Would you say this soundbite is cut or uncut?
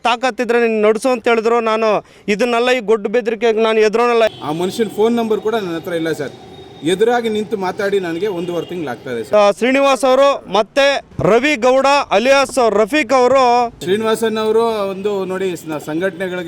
cut